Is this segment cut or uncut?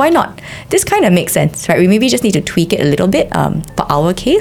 uncut